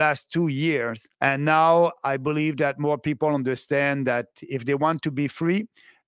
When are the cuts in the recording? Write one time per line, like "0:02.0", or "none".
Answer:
0:01.0

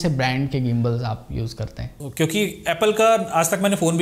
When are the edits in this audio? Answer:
0:01.9

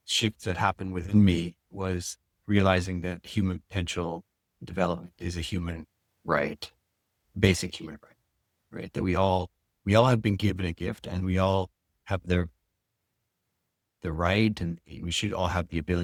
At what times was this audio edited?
none

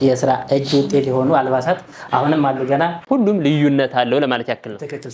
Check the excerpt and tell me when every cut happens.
0:03.0

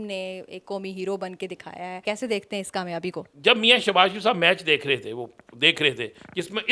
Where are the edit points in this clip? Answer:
0:02.0
0:03.2

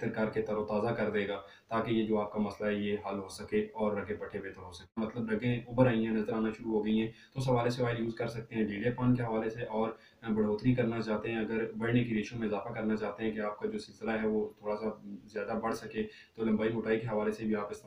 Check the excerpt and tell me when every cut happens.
0:05.0

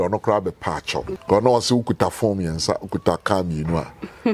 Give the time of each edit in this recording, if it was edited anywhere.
0:01.1

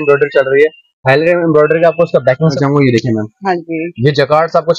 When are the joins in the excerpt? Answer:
0:02.5

